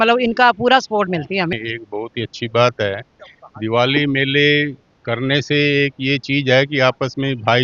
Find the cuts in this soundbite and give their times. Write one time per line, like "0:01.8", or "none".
0:01.6